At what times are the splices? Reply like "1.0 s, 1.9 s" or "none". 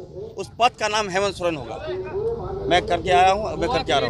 none